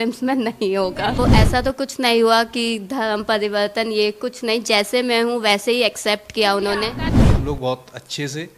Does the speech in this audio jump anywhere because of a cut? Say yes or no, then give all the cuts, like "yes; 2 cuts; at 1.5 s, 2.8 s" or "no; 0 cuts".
yes; 2 cuts; at 1.2 s, 7.0 s